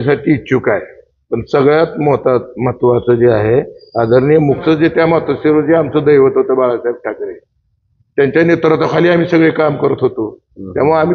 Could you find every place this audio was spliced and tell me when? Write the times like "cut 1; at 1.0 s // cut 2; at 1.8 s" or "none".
cut 1; at 4.6 s